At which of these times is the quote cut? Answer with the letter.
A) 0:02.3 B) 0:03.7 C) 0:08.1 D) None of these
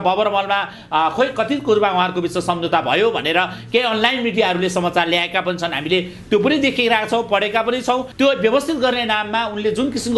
C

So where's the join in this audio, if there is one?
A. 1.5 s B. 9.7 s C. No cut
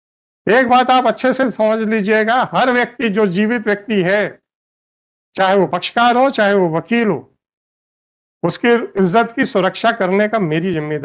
C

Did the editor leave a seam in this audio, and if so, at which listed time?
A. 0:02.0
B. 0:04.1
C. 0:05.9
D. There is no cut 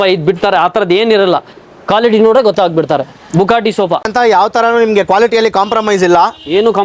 B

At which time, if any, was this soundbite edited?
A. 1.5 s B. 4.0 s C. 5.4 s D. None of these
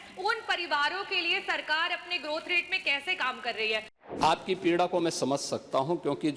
B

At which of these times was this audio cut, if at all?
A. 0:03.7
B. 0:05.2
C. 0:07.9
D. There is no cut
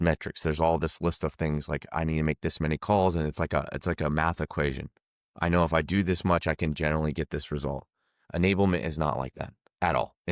D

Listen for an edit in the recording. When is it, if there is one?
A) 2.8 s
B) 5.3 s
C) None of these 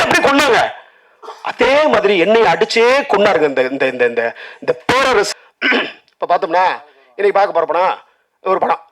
B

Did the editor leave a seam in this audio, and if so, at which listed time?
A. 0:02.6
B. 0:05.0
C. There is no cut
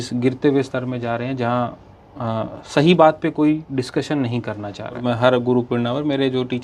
B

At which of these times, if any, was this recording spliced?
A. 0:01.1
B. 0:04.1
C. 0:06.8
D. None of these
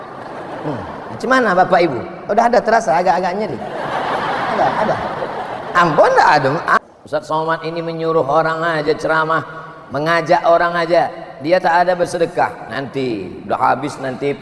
C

